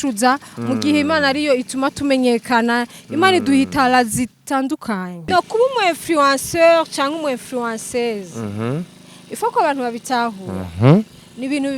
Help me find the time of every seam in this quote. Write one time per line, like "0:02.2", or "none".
0:05.3